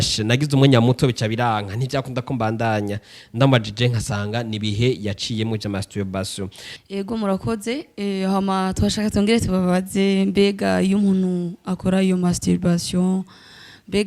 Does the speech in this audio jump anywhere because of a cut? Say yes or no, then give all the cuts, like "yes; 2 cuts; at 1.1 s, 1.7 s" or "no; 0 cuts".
yes; 1 cut; at 6.7 s